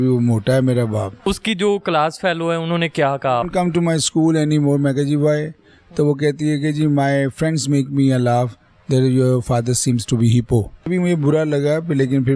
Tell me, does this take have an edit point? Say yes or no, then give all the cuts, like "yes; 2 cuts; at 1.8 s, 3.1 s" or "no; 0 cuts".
yes; 3 cuts; at 1.2 s, 3.4 s, 10.9 s